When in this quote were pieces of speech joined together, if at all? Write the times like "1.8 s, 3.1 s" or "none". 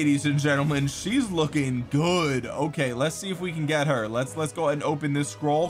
none